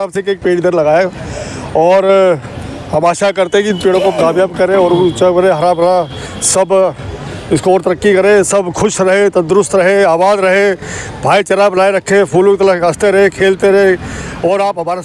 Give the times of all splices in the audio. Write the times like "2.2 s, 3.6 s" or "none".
none